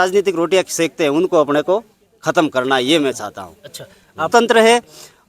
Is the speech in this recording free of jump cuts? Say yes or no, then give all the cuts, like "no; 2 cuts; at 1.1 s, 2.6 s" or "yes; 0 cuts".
no; 1 cut; at 4.3 s